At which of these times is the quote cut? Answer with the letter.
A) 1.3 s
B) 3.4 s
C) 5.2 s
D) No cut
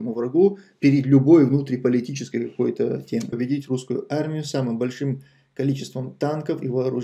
B